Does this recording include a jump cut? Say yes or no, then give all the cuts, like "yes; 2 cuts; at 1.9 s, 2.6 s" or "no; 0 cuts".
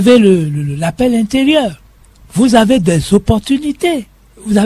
no; 0 cuts